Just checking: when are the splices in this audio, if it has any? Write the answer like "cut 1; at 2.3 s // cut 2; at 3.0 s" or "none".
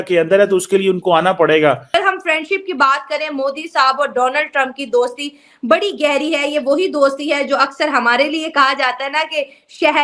cut 1; at 1.9 s